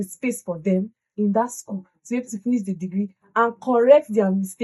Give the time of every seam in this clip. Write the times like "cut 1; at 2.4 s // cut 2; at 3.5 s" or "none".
none